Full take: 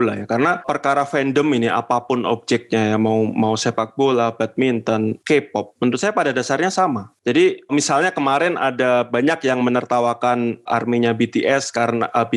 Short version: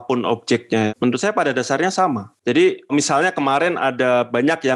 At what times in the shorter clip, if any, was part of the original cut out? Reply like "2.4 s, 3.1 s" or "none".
0.9 s